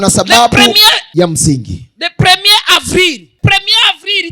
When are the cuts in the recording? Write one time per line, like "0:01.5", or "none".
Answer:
0:01.0
0:03.3